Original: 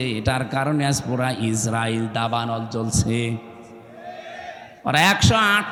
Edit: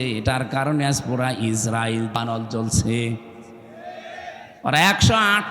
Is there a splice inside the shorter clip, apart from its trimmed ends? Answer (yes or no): yes